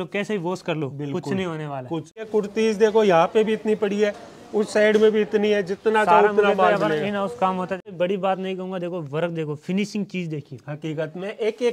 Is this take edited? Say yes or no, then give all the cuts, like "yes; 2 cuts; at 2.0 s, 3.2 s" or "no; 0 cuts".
yes; 2 cuts; at 2.3 s, 7.9 s